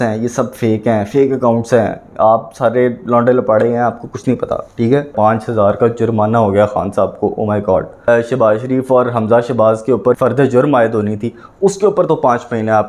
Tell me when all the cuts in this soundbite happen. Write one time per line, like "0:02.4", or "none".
0:05.1
0:08.1
0:10.2

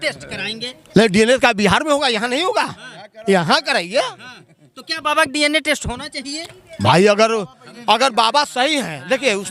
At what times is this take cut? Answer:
none

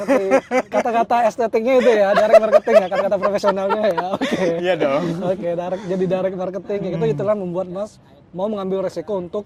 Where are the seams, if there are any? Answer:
none

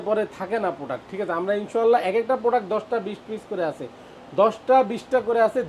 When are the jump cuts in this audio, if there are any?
none

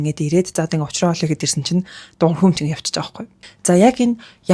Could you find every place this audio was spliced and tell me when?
0:03.3

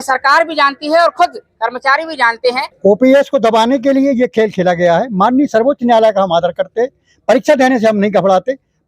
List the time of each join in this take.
0:02.7

